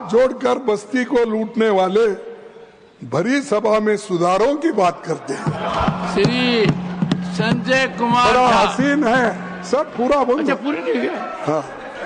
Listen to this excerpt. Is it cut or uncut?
uncut